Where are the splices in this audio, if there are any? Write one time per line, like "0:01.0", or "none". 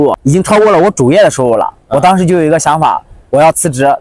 none

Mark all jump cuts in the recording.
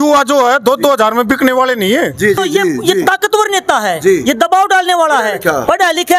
0:02.4

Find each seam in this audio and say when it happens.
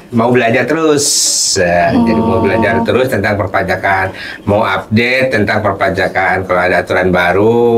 none

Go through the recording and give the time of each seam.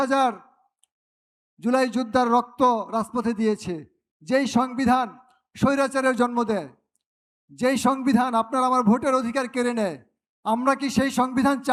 none

